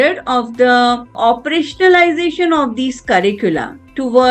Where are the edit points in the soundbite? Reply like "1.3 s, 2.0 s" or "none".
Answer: 1.1 s